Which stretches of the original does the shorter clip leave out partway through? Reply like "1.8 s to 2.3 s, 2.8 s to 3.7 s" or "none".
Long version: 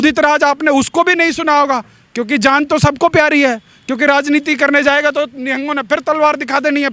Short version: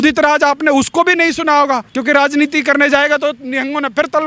1.9 s to 3.8 s

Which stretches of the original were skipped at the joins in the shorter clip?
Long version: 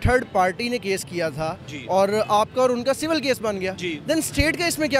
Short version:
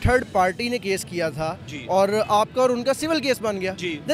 none

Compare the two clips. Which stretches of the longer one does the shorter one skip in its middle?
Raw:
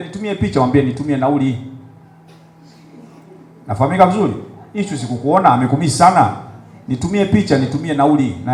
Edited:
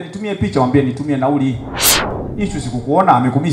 2.2 s to 4.5 s

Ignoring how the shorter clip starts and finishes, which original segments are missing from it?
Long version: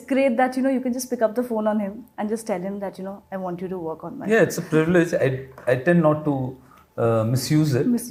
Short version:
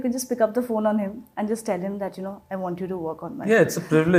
none

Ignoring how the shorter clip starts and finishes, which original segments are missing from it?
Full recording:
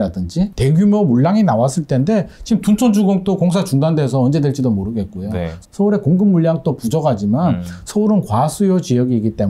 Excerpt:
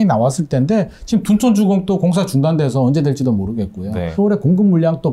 5.4 s to 5.7 s

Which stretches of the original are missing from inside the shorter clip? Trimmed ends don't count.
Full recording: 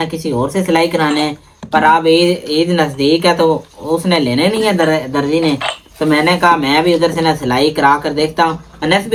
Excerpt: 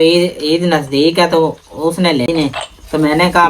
4.3 s to 5.4 s

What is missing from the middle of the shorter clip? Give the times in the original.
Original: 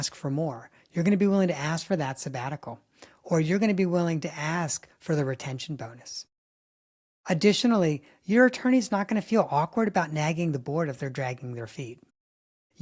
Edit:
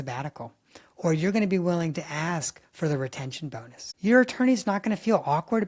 6.1 s to 8.1 s

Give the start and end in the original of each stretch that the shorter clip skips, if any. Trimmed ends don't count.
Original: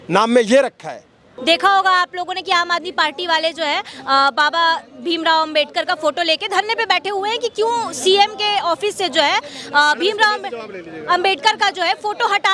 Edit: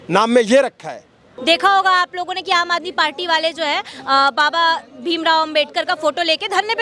none

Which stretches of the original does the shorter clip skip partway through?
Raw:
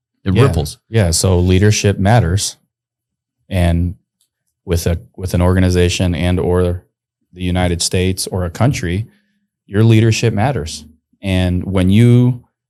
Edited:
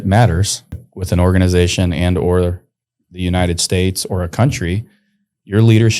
2.8 s to 5.1 s

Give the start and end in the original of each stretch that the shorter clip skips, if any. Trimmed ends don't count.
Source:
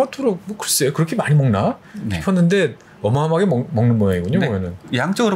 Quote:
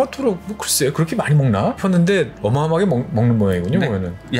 1.8 s to 2.2 s, 2.8 s to 2.9 s

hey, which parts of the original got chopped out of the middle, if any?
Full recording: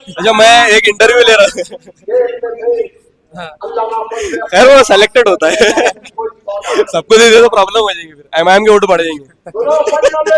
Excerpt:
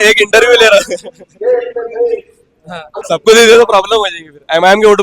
3.7 s to 6.9 s

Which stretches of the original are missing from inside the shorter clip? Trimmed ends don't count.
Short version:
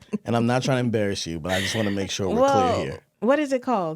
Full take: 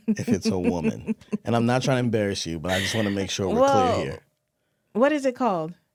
4.2 s to 4.8 s

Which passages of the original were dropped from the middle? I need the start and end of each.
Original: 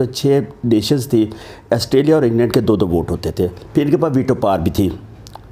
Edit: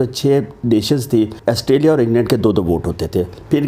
1.4 s to 1.6 s

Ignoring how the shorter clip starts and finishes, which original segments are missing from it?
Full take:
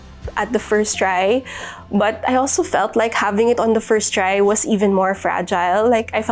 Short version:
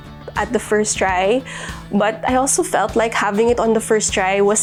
none

